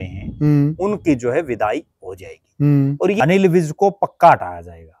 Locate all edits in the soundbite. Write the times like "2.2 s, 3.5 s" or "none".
3.2 s